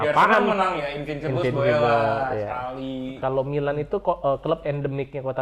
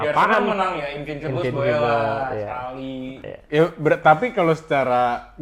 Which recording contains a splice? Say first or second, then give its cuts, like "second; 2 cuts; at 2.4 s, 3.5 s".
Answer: first; 1 cut; at 3.1 s